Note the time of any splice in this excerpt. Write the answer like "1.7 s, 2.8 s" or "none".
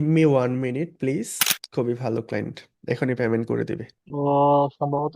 1.6 s